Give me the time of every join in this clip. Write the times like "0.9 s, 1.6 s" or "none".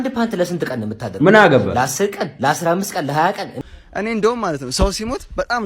3.5 s

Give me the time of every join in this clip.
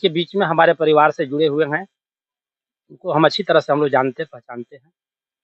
none

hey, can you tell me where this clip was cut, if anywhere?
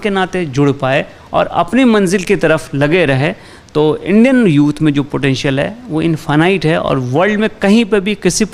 none

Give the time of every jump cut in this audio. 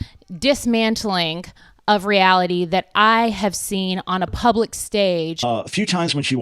5.3 s

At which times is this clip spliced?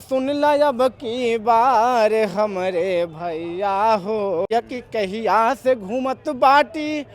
4.5 s

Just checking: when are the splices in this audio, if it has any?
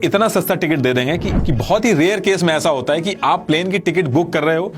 1.3 s

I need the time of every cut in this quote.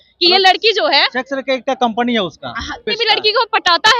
2.9 s

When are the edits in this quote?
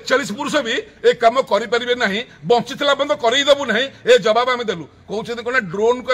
none

